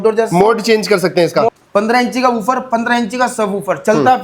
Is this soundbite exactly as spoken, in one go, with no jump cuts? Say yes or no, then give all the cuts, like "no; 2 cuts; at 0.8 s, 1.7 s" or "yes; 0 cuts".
no; 1 cut; at 1.6 s